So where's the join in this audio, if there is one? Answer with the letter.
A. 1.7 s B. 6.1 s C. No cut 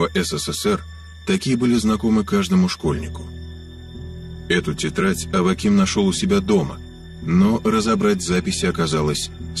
A